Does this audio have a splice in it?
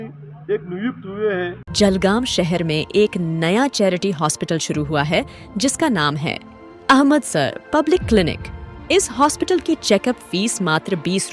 yes; 1 cut; at 1.6 s

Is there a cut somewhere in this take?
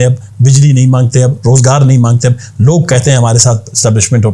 no; 0 cuts

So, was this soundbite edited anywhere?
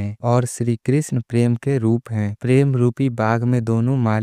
no; 0 cuts

